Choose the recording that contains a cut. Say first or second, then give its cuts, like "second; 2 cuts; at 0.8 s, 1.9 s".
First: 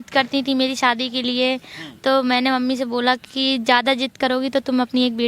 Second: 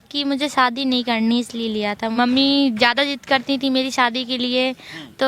second; 1 cut; at 2.1 s